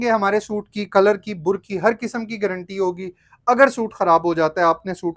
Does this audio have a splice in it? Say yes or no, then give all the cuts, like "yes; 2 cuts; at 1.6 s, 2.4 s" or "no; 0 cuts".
no; 0 cuts